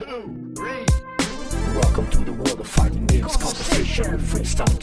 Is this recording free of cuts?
no; 1 cut; at 1.6 s

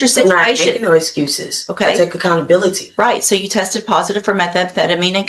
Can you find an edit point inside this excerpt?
no; 0 cuts

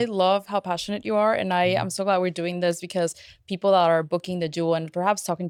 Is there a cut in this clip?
no; 0 cuts

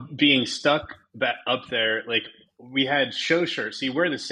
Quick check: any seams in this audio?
no; 0 cuts

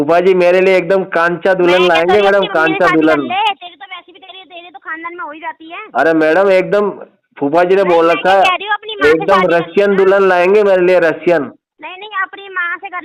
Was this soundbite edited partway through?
no; 0 cuts

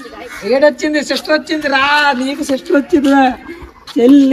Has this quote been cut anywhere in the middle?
no; 0 cuts

